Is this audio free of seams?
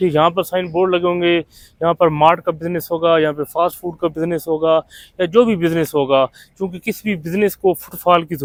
yes; 0 cuts

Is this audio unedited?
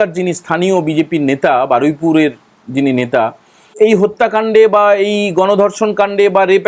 no; 1 cut; at 3.8 s

